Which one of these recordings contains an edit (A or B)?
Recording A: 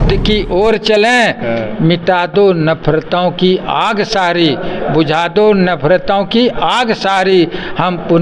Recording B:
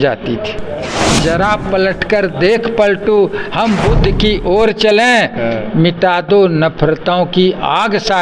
B